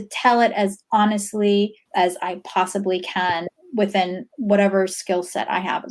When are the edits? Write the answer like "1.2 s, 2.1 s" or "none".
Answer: 1.8 s